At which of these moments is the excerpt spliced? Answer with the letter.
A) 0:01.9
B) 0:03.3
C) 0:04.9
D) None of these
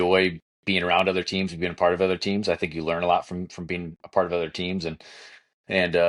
D